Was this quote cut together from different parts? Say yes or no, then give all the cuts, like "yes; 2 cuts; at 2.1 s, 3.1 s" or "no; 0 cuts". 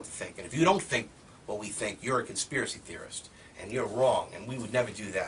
yes; 1 cut; at 2.8 s